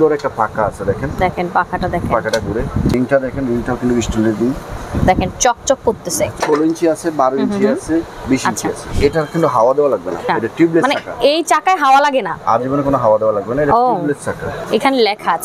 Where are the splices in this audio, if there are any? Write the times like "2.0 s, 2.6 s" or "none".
2.9 s, 4.8 s, 6.4 s, 8.9 s, 10.2 s, 14.5 s